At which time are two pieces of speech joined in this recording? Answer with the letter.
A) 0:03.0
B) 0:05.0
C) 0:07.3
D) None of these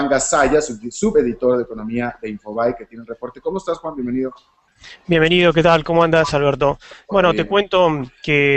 A